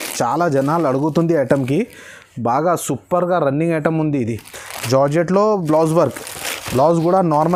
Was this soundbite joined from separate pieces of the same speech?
no; 0 cuts

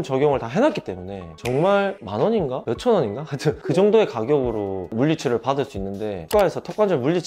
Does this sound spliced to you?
yes; 1 cut; at 6.2 s

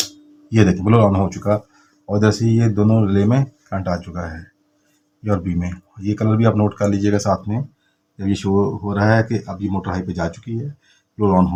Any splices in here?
no; 0 cuts

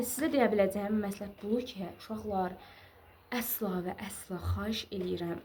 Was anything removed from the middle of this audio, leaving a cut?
no; 0 cuts

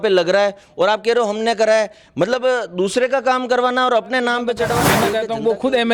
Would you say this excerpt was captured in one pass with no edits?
no; 1 cut; at 4.9 s

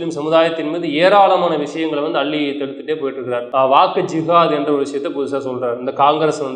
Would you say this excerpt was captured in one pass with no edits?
no; 1 cut; at 3.5 s

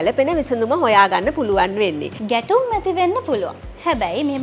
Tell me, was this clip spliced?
yes; 1 cut; at 2.1 s

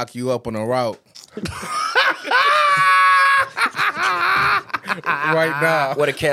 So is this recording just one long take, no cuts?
yes; 0 cuts

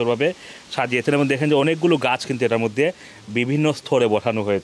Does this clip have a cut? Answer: no; 0 cuts

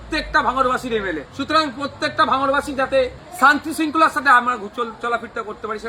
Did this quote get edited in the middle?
yes; 2 cuts; at 1.3 s, 3.2 s

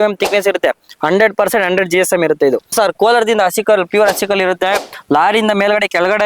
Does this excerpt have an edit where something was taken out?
yes; 1 cut; at 2.7 s

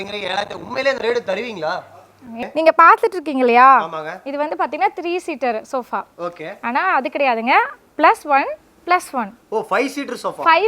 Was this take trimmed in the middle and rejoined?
yes; 1 cut; at 2.4 s

